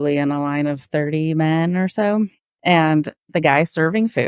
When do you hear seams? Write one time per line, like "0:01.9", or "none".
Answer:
0:02.5